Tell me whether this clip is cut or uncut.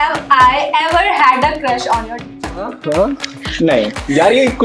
cut